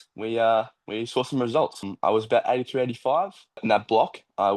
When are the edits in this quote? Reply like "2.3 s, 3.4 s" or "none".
1.9 s, 3.6 s

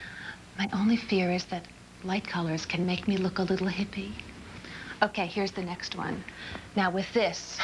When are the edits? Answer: 4.3 s

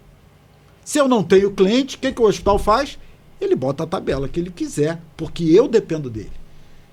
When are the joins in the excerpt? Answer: none

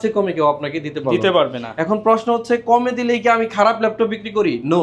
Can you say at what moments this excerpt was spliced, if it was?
none

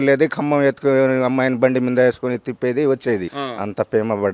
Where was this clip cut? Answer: 3.4 s

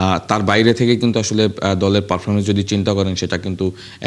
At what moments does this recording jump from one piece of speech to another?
none

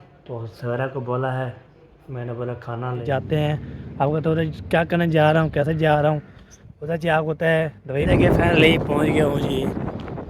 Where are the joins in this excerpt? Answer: 3.0 s, 7.8 s

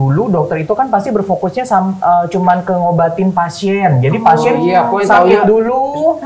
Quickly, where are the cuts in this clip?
none

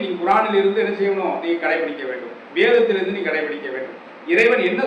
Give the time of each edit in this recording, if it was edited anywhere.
none

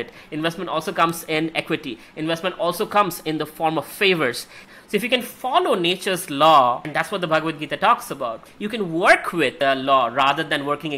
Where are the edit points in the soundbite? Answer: 4.5 s, 6.9 s, 9.5 s

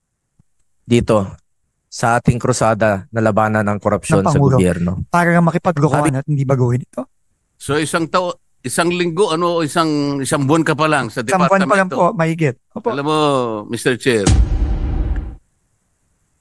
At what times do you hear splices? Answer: 5.0 s

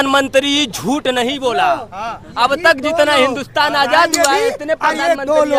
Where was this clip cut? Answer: none

